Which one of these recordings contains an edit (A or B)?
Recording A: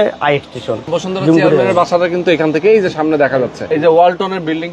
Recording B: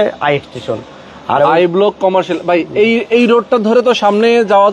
A